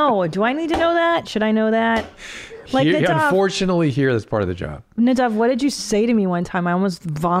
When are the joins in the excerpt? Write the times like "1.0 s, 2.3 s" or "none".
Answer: none